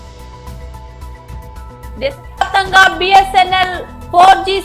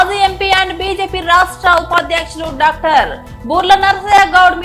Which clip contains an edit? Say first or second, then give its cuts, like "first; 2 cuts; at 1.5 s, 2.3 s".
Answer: first; 1 cut; at 1.0 s